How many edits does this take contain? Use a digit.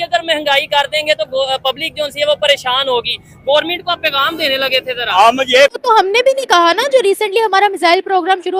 1